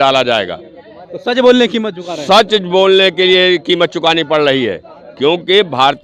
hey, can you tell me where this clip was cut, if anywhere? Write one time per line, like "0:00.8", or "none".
none